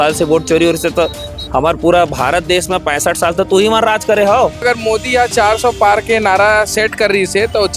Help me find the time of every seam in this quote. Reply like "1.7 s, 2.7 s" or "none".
4.6 s

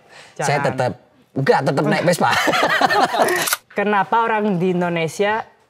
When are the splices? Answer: 3.5 s

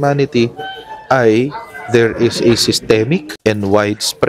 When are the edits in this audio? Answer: 3.3 s

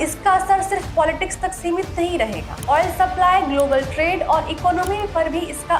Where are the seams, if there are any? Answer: none

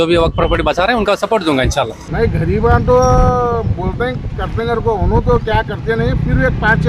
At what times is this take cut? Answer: 2.0 s

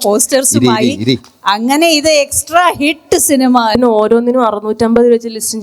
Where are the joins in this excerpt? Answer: 3.7 s

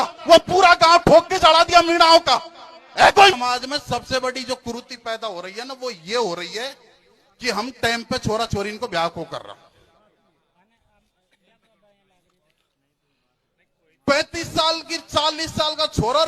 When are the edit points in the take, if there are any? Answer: 3.3 s

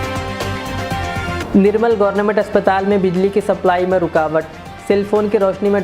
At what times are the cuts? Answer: 1.4 s

